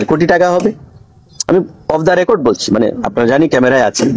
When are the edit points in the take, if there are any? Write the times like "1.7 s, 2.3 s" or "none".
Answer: none